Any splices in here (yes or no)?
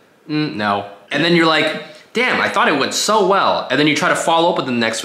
yes